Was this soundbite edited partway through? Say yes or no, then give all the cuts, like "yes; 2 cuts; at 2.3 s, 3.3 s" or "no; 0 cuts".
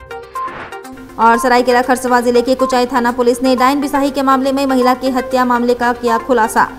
no; 0 cuts